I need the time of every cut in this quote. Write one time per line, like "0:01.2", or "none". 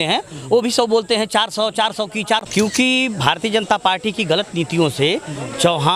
0:02.4